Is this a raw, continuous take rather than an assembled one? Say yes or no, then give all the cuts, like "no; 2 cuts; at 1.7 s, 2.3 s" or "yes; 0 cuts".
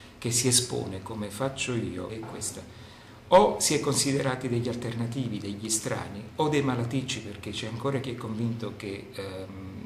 no; 1 cut; at 2.1 s